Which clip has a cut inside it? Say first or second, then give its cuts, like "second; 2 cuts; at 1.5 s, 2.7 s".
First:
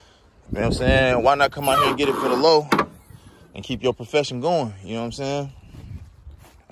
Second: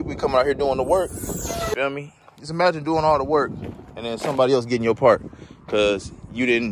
second; 1 cut; at 1.7 s